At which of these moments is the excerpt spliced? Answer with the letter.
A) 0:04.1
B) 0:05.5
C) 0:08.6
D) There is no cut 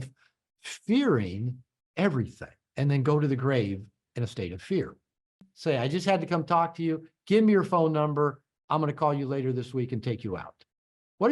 B